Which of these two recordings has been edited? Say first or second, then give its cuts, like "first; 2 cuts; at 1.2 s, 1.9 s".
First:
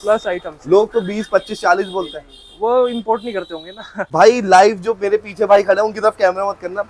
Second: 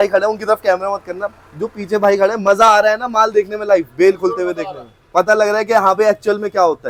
first; 1 cut; at 4.0 s